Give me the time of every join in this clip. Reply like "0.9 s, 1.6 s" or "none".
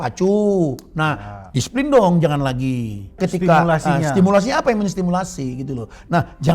3.2 s